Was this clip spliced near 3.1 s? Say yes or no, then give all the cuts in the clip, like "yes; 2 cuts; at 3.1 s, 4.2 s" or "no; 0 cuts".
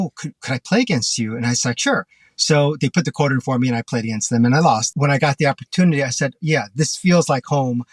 no; 1 cut; at 4.9 s